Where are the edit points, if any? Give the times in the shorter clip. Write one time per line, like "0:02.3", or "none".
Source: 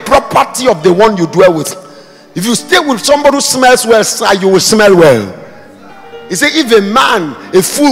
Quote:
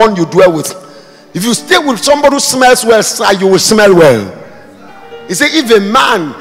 none

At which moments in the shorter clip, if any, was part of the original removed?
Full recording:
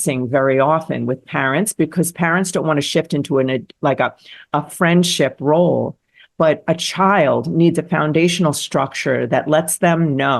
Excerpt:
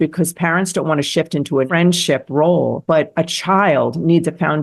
0:01.7
0:02.8

